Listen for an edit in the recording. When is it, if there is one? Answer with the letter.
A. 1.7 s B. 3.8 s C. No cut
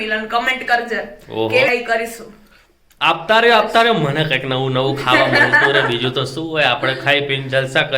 A